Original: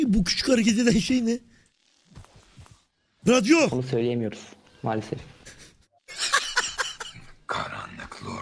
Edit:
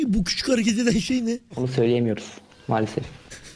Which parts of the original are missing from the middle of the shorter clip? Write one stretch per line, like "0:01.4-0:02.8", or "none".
0:01.6-0:03.7